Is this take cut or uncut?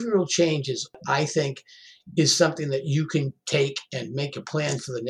cut